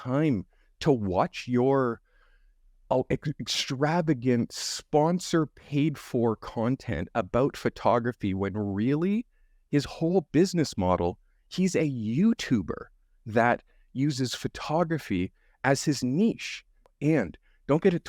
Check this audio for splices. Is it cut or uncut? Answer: cut